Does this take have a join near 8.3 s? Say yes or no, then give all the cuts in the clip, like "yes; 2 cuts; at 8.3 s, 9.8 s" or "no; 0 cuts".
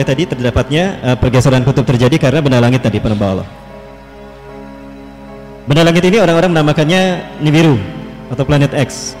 no; 0 cuts